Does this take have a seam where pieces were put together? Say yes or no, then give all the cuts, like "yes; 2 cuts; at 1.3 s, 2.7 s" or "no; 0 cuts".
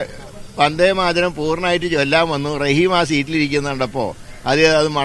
no; 0 cuts